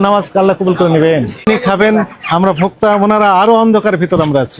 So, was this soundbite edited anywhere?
yes; 1 cut; at 1.5 s

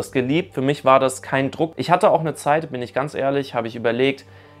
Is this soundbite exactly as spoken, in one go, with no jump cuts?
no; 1 cut; at 1.8 s

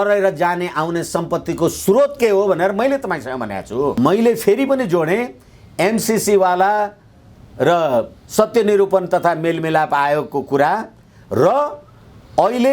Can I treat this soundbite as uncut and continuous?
no; 1 cut; at 4.0 s

